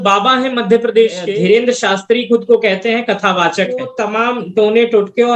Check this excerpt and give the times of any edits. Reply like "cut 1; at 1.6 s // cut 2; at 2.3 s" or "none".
cut 1; at 1.3 s // cut 2; at 4.0 s